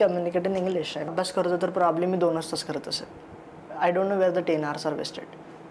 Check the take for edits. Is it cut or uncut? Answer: cut